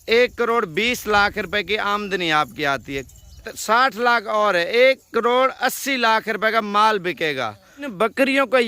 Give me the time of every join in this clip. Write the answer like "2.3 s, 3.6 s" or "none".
3.5 s, 7.9 s